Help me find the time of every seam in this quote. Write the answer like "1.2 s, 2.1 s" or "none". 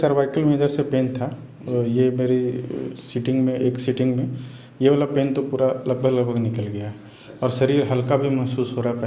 none